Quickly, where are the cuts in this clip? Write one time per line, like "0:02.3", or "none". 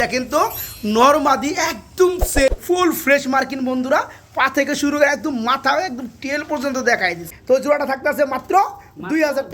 0:02.5
0:07.3